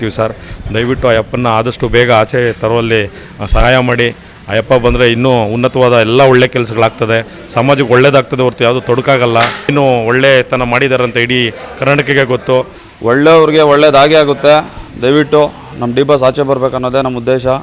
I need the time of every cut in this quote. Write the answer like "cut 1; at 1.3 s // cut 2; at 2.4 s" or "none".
cut 1; at 9.7 s // cut 2; at 12.8 s